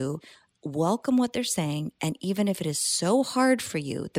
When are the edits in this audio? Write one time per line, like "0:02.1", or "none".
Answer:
none